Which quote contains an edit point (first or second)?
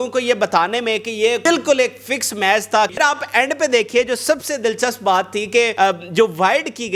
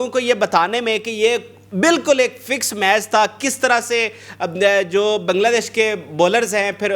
first